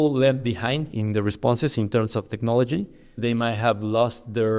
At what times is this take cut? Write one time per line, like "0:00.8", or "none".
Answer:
0:00.9